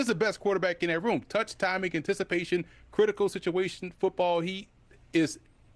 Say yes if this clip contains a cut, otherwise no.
no